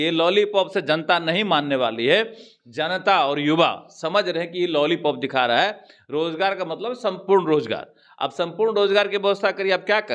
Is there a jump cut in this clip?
no; 0 cuts

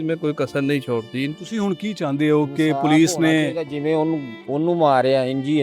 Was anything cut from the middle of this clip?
yes; 1 cut; at 1.3 s

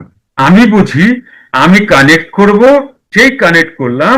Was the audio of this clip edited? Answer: yes; 1 cut; at 3.0 s

